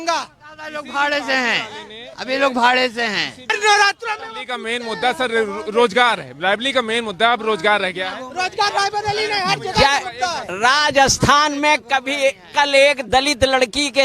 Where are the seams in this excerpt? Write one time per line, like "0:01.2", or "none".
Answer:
0:03.6